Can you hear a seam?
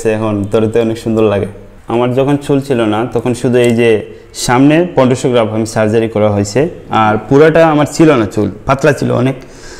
no; 0 cuts

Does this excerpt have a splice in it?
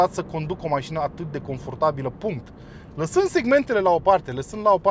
no; 0 cuts

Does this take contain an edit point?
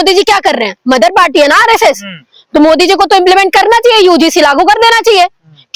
no; 0 cuts

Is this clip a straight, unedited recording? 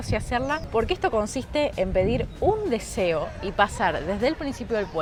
yes; 0 cuts

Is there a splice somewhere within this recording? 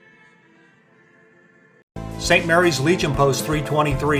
no; 0 cuts

